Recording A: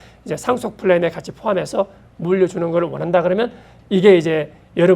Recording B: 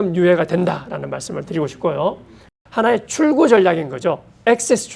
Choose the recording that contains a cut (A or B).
B